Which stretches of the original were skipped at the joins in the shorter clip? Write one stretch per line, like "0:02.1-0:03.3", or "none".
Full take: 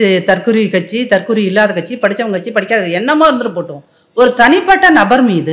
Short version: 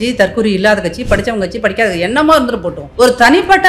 0:03.7-0:04.0